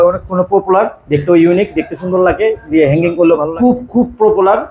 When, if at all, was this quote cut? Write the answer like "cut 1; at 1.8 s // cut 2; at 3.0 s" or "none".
cut 1; at 3.5 s